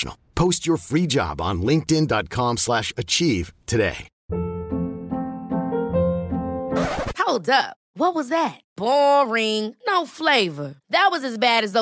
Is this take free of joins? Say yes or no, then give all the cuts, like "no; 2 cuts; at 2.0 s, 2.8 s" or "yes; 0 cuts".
no; 1 cut; at 4.1 s